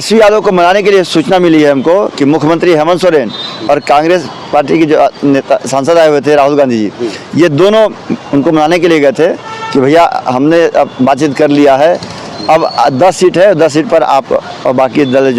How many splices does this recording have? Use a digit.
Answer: 0